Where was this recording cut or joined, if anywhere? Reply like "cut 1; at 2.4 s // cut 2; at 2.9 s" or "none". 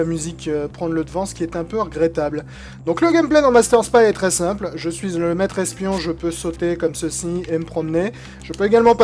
cut 1; at 6.1 s